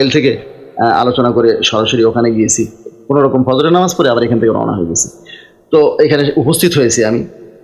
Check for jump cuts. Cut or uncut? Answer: uncut